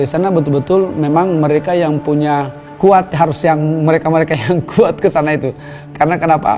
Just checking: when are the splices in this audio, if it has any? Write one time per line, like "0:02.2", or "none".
0:02.6